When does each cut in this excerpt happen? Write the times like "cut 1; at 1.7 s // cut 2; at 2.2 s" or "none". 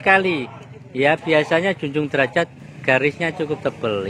cut 1; at 2.6 s